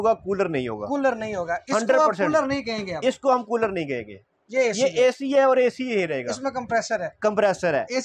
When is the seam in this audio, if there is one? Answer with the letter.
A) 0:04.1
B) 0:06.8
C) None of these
C